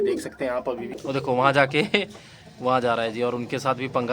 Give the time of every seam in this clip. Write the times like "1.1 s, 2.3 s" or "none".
0.9 s